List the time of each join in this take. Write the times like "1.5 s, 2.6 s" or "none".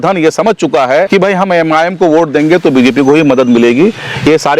1.1 s